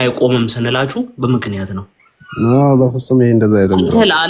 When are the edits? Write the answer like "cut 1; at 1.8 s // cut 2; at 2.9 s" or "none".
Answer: none